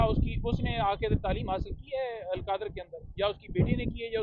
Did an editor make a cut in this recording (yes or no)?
no